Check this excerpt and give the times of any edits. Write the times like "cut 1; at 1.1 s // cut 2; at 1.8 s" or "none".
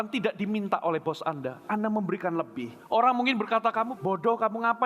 cut 1; at 2.7 s // cut 2; at 3.9 s